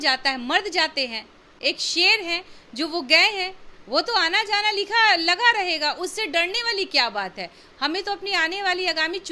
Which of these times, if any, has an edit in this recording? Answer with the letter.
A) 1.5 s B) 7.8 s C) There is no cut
C